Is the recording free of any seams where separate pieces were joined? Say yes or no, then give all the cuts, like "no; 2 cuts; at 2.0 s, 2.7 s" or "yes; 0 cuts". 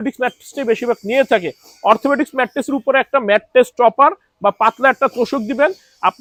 yes; 0 cuts